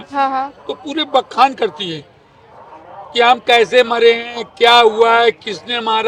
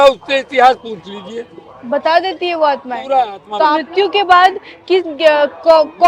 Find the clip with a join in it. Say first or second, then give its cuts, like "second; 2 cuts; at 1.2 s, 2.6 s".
second; 1 cut; at 3.9 s